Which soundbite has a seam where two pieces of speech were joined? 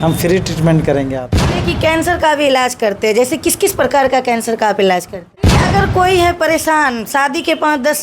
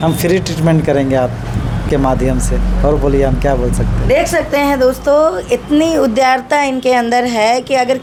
first; 2 cuts; at 1.6 s, 5.6 s

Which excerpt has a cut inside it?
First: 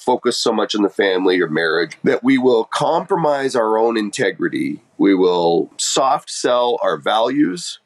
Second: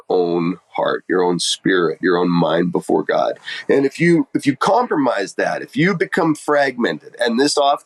first; 3 cuts; at 1.9 s, 4.8 s, 5.7 s

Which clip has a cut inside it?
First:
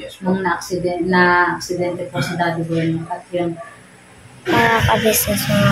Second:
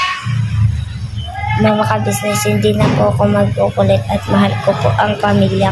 first; 1 cut; at 4.5 s

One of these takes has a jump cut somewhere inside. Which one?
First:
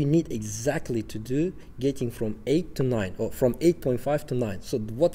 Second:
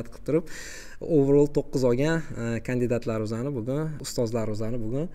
second; 1 cut; at 4.0 s

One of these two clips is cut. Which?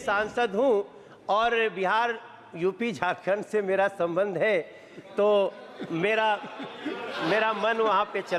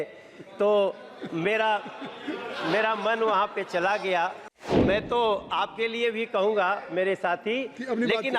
second; 1 cut; at 4.8 s

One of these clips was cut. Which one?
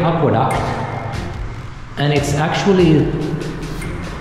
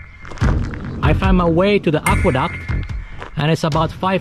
second; 1 cut; at 1.0 s

